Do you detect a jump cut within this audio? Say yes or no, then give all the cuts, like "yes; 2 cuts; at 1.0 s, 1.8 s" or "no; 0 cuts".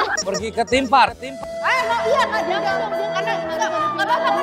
yes; 1 cut; at 1.3 s